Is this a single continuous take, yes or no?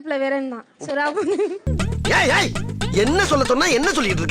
no